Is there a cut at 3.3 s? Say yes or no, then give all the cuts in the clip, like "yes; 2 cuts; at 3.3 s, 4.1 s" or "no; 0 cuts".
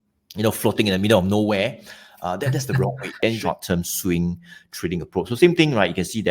yes; 1 cut; at 3.3 s